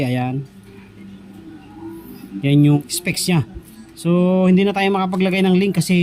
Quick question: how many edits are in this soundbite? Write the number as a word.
one